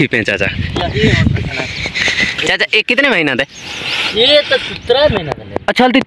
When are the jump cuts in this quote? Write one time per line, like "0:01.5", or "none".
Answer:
none